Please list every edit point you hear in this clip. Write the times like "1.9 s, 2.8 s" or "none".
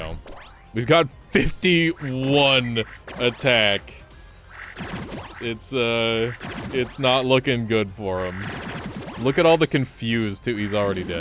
none